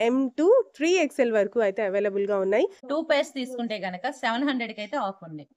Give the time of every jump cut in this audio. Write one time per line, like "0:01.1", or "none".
0:02.8